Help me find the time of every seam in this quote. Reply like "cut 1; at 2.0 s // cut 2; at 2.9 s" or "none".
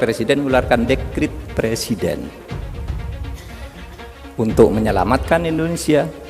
cut 1; at 2.4 s // cut 2; at 4.0 s